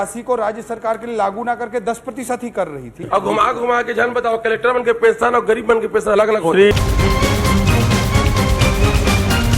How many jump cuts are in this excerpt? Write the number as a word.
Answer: two